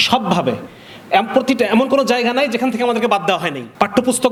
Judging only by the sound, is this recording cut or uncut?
uncut